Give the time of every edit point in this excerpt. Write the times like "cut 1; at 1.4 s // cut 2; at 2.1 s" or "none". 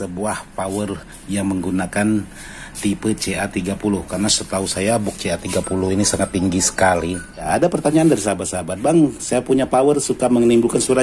cut 1; at 7.5 s